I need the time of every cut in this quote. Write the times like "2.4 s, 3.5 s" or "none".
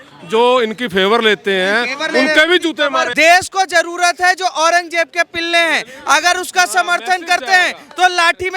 3.1 s